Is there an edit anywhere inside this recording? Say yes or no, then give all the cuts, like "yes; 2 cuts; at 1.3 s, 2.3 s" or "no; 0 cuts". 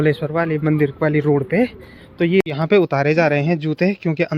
yes; 1 cut; at 2.4 s